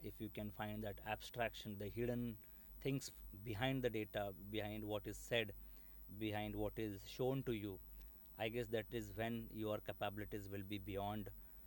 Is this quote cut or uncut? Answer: uncut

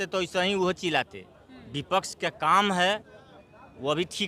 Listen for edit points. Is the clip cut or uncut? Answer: uncut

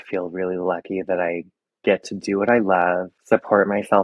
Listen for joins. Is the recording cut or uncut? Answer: cut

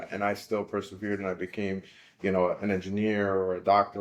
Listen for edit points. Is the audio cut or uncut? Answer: uncut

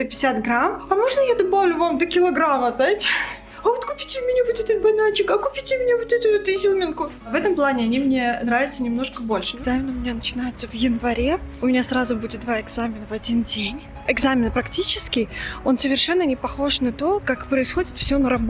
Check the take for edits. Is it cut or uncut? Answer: cut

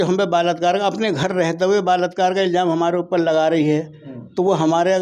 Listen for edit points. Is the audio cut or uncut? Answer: uncut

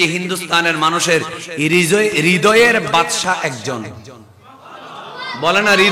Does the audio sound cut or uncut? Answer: uncut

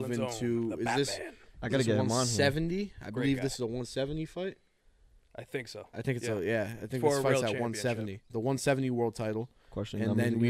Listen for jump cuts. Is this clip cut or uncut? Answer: cut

